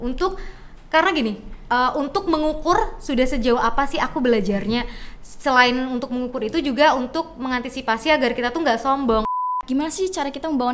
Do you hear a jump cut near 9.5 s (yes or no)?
yes